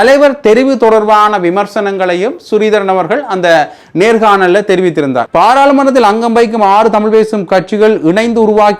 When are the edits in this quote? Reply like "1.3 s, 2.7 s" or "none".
5.2 s